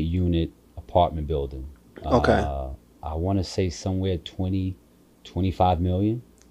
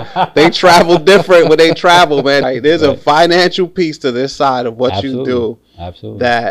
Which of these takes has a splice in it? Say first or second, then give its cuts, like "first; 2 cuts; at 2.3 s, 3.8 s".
second; 1 cut; at 2.4 s